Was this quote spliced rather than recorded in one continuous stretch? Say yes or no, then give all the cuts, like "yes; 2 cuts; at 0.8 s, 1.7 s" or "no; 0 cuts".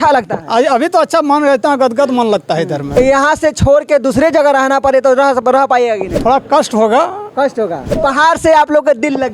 yes; 3 cuts; at 2.8 s, 6.1 s, 7.9 s